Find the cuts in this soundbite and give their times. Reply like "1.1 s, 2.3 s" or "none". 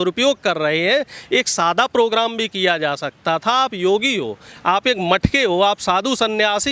none